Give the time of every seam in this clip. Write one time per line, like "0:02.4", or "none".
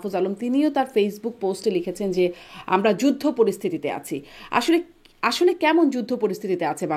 none